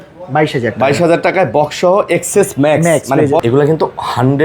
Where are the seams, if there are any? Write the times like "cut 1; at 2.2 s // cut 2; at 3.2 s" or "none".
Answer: cut 1; at 3.4 s

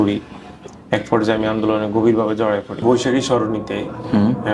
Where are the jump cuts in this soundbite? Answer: cut 1; at 2.8 s

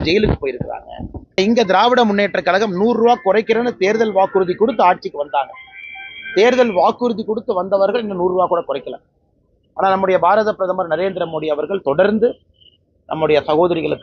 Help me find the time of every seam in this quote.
cut 1; at 1.4 s

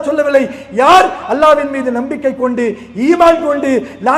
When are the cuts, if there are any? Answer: none

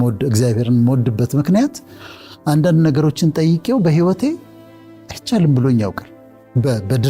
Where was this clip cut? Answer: none

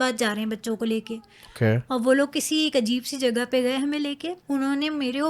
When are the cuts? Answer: cut 1; at 4.3 s

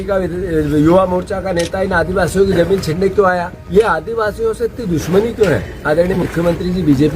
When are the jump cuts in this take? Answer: cut 1; at 3.5 s

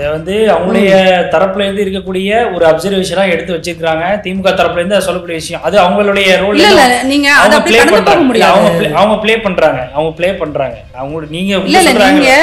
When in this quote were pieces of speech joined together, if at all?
cut 1; at 10.9 s

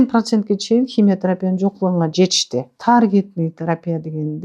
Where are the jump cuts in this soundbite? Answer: cut 1; at 2.7 s

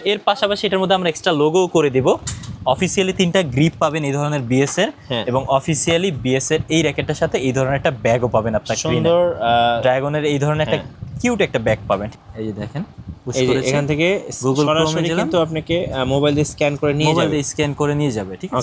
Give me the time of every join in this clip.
cut 1; at 12.1 s

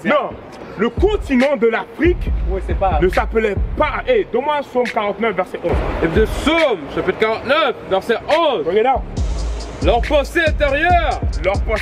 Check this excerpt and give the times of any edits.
cut 1; at 5.8 s

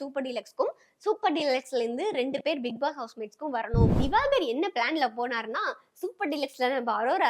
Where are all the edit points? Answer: cut 1; at 4.0 s

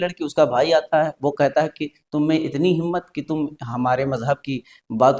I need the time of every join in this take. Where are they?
none

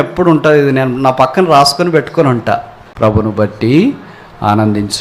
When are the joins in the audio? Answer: cut 1; at 2.8 s

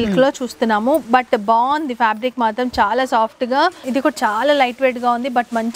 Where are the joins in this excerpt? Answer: cut 1; at 3.9 s

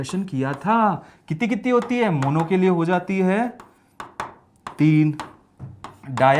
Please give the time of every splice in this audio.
none

